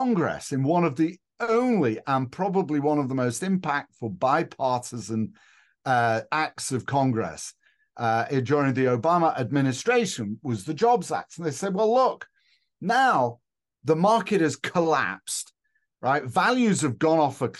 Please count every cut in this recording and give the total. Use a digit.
0